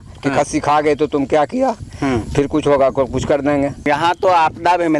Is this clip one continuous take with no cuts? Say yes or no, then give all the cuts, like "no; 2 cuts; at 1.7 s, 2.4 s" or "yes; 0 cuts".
no; 1 cut; at 3.9 s